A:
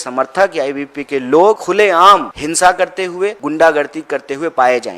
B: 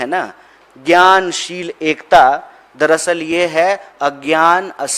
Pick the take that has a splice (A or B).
A